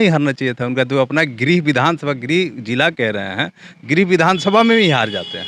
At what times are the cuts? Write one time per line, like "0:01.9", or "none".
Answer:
none